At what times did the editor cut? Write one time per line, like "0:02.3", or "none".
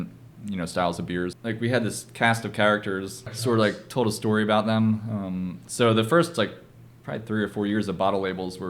0:01.4
0:03.2